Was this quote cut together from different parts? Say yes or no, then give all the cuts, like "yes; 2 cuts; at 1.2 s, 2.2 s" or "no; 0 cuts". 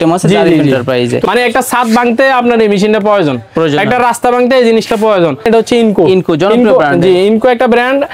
yes; 2 cuts; at 1.2 s, 5.5 s